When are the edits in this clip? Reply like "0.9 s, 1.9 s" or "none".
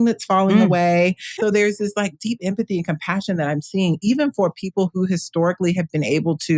1.3 s